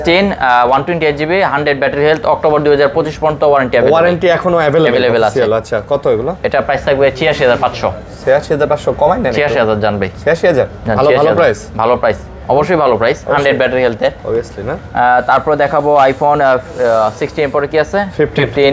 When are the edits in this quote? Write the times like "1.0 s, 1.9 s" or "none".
none